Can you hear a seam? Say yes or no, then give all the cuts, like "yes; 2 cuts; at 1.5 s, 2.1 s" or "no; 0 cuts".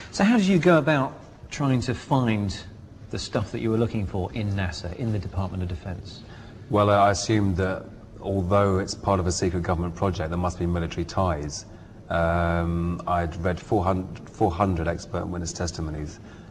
yes; 1 cut; at 4.8 s